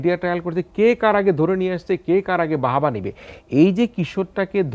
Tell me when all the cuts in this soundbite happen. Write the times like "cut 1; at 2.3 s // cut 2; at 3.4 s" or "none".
none